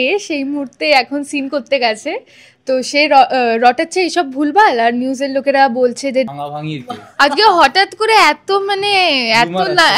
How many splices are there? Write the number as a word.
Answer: one